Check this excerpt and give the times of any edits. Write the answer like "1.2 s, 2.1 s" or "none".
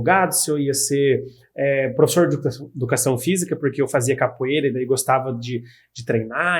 none